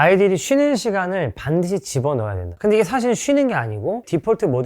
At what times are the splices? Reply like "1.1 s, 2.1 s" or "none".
2.5 s